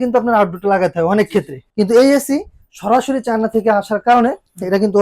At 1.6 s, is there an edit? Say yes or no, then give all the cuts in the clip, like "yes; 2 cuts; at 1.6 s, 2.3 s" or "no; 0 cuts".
yes; 1 cut; at 1.6 s